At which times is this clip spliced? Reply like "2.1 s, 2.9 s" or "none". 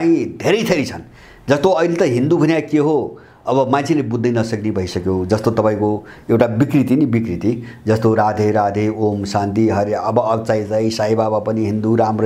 none